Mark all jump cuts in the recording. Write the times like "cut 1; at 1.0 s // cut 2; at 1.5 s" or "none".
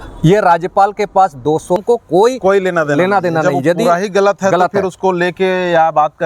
cut 1; at 1.8 s